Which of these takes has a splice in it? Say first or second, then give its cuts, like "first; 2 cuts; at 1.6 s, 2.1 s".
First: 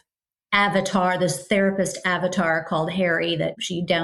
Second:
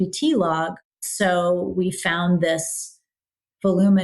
second; 1 cut; at 1.0 s